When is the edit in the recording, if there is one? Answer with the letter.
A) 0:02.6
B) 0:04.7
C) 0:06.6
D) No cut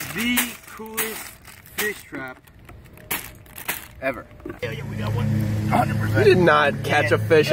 B